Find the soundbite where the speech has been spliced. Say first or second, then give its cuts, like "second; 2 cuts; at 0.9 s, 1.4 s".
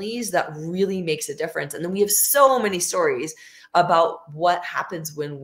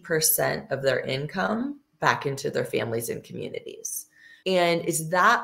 second; 1 cut; at 4.3 s